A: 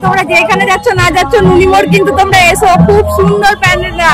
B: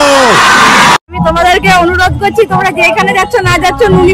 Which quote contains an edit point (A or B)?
B